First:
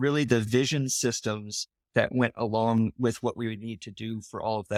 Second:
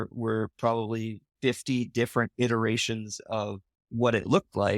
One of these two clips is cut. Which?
second; 1 cut; at 1.2 s

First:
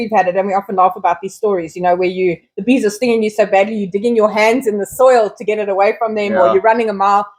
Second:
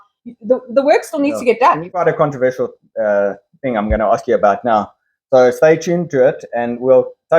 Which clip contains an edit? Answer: second; 1 cut; at 2.0 s

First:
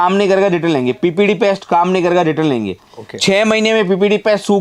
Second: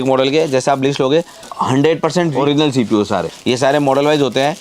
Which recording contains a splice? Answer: second; 3 cuts; at 1.4 s, 2.3 s, 3.3 s

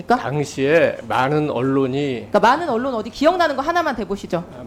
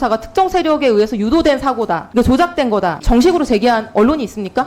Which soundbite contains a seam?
second; 2 cuts; at 2.0 s, 3.0 s

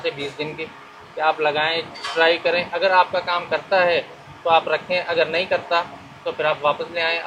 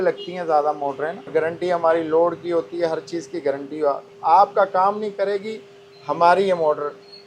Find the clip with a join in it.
second; 1 cut; at 1.3 s

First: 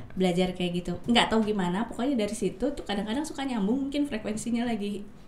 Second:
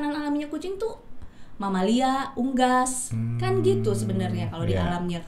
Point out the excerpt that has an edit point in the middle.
first; 1 cut; at 1.0 s

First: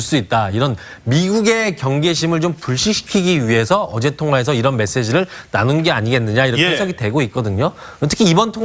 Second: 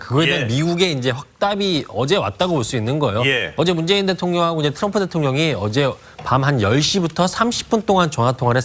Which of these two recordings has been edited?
second; 1 cut; at 4.8 s

